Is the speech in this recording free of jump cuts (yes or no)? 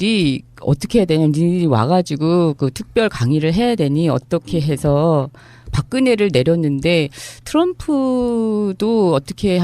no